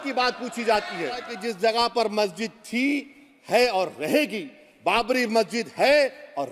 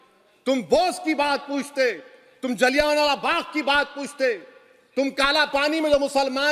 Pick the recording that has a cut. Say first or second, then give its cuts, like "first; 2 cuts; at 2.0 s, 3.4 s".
first; 1 cut; at 1.4 s